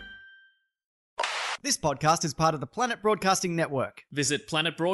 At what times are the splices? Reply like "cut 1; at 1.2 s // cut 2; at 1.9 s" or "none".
cut 1; at 1.4 s